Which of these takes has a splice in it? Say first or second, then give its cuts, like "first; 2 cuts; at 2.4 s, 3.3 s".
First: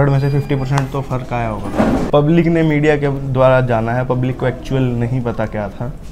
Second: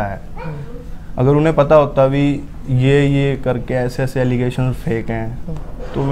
first; 1 cut; at 2.1 s